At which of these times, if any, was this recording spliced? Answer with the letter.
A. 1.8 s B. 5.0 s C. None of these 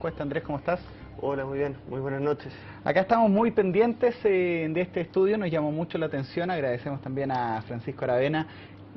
B